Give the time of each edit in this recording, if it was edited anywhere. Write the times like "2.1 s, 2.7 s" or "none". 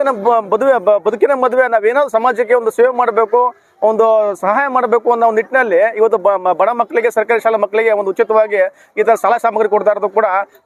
none